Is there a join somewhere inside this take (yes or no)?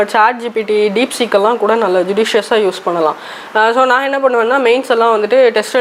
no